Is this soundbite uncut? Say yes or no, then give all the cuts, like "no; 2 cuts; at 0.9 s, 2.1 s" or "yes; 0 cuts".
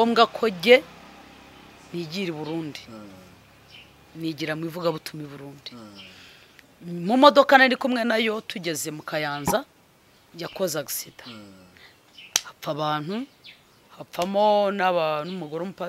yes; 0 cuts